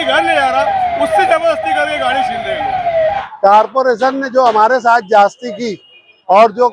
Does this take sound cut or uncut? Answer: cut